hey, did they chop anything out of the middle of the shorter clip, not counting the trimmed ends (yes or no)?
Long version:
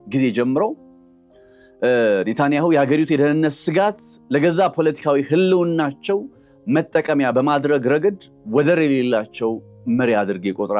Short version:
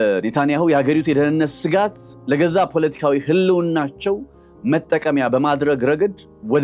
no